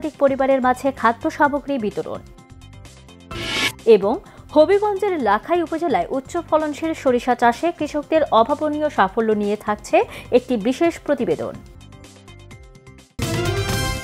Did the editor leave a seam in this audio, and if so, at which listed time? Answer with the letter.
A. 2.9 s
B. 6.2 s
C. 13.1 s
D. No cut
C